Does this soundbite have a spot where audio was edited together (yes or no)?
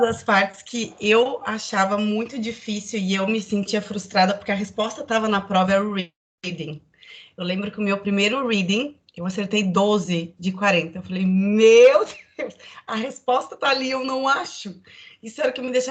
no